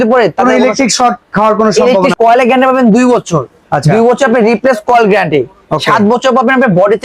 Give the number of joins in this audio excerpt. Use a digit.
1